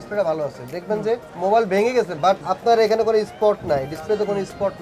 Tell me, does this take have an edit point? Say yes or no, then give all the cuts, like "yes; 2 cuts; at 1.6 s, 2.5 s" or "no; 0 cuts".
no; 0 cuts